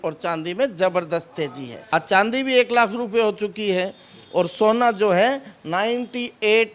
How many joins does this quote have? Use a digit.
1